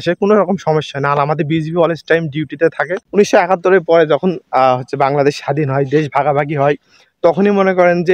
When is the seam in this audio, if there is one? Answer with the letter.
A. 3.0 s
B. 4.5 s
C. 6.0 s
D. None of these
A